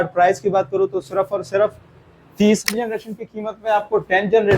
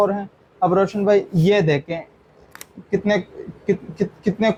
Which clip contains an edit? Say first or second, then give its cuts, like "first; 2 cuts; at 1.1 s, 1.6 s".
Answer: first; 1 cut; at 2.7 s